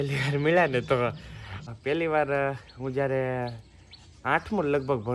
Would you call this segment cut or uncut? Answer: cut